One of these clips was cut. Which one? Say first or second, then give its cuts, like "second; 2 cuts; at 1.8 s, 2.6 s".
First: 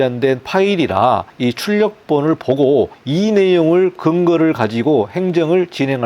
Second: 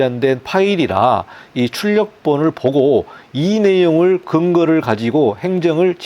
first; 2 cuts; at 1.3 s, 3.0 s